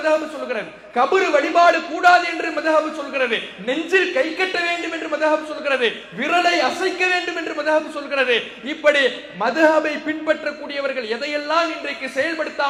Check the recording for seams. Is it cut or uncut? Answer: uncut